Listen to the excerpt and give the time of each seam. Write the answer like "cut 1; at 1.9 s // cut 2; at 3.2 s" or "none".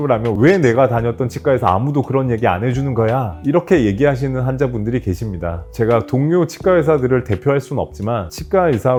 none